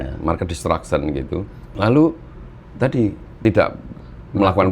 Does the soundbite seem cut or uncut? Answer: cut